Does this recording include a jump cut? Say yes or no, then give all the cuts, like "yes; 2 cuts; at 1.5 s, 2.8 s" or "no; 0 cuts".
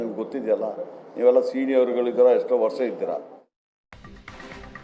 yes; 1 cut; at 3.8 s